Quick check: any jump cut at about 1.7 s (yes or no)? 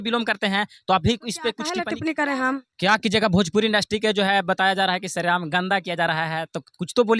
yes